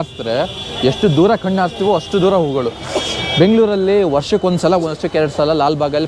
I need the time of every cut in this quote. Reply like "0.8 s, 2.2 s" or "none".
none